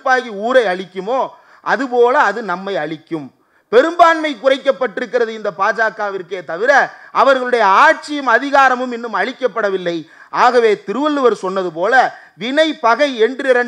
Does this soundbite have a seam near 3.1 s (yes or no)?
no